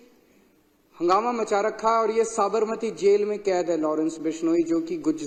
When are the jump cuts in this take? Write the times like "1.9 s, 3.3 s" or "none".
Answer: none